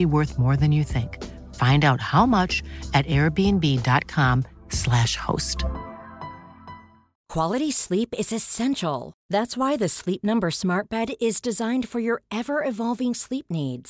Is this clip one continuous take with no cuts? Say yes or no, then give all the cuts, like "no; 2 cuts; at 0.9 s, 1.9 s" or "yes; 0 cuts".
no; 1 cut; at 7.1 s